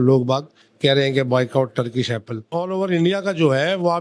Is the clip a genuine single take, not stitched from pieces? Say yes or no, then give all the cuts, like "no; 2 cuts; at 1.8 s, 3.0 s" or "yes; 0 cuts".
no; 1 cut; at 2.5 s